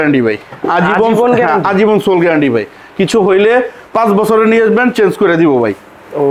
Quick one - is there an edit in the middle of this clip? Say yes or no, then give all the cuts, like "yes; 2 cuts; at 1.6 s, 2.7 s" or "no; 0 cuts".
no; 0 cuts